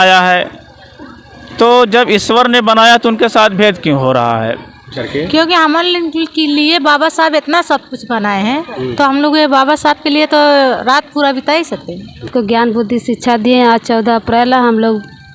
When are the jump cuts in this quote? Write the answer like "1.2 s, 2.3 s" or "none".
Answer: 4.8 s, 12.3 s